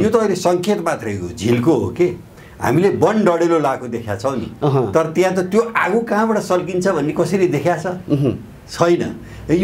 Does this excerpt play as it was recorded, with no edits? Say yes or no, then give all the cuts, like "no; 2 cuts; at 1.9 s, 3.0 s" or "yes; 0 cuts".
yes; 0 cuts